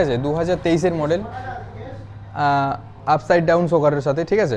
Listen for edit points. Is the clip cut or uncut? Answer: uncut